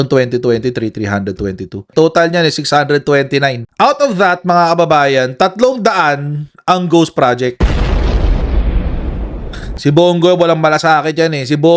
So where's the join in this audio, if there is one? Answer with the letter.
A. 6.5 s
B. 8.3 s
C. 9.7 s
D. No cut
C